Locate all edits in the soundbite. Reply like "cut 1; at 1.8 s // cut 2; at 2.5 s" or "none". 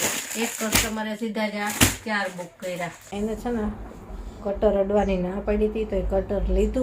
cut 1; at 3.1 s